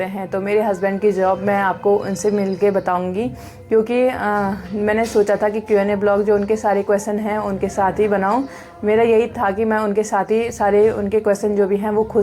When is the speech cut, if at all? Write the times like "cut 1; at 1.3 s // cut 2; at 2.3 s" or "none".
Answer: none